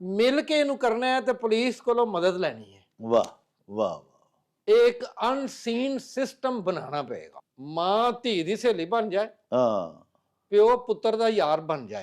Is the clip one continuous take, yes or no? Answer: no